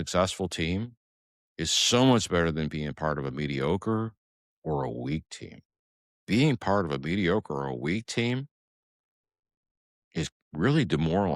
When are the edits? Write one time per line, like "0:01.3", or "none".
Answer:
none